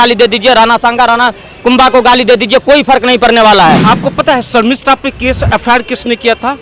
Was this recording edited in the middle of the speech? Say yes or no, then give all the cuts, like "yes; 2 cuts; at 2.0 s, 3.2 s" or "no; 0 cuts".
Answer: yes; 1 cut; at 3.8 s